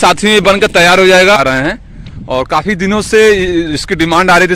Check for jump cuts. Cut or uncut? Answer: cut